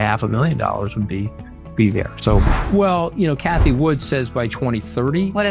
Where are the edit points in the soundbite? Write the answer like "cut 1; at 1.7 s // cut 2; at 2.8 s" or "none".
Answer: cut 1; at 2.6 s